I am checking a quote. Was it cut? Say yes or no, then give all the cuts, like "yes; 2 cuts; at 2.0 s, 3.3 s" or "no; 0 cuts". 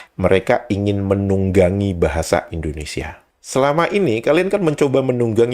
yes; 1 cut; at 3.4 s